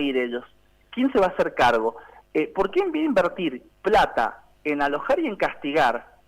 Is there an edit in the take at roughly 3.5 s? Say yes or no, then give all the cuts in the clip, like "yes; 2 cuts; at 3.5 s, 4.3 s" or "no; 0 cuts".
no; 0 cuts